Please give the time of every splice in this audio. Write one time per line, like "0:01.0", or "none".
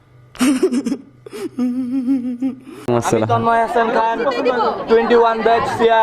0:02.9